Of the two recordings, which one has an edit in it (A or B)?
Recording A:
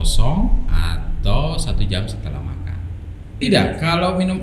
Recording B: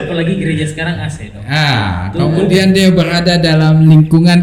A